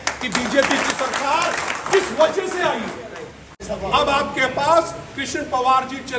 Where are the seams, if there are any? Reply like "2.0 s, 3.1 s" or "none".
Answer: 3.5 s